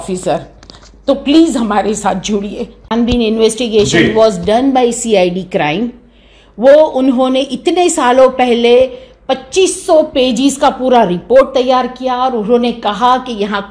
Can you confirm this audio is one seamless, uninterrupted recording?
no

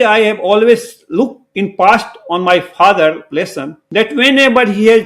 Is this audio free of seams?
no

